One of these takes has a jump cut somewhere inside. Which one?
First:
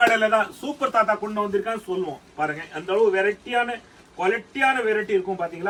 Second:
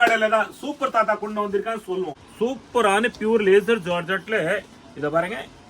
second; 1 cut; at 2.2 s

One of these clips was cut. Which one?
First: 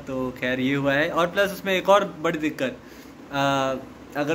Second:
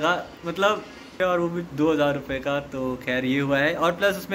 second; 1 cut; at 1.2 s

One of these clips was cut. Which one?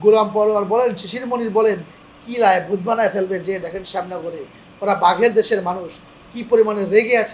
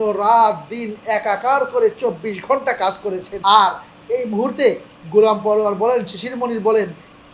second; 1 cut; at 3.3 s

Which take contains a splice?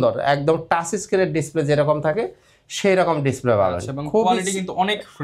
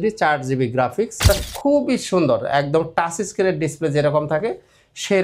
second; 1 cut; at 1.3 s

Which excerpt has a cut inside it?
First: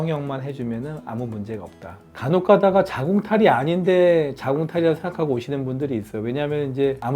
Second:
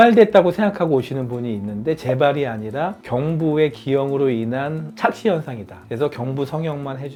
first; 1 cut; at 2.0 s

